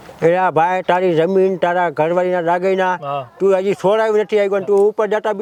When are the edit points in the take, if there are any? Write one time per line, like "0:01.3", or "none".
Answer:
none